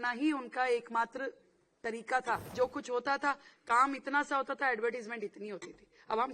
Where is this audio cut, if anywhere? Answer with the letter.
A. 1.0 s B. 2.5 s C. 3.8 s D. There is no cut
B